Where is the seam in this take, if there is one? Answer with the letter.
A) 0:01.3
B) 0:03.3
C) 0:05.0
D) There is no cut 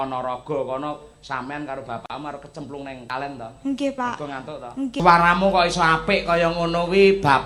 C